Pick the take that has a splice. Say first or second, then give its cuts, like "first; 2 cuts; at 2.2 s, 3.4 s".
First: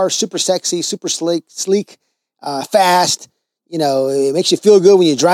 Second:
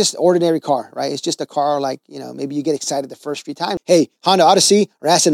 second; 1 cut; at 3.7 s